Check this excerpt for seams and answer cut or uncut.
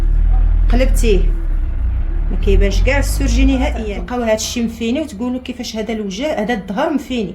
cut